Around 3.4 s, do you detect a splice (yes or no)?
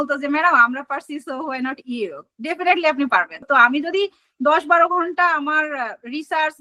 no